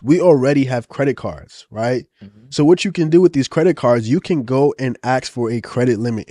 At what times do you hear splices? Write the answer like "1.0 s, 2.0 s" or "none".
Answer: none